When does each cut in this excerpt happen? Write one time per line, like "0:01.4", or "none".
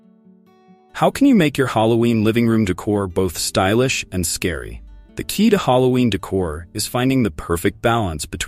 0:00.9